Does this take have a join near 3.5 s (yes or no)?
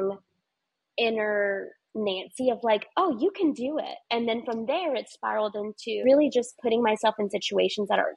no